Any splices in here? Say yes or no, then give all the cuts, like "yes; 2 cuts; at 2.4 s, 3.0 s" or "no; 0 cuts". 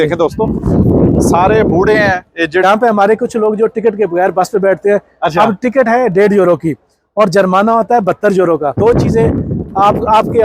yes; 2 cuts; at 2.6 s, 8.8 s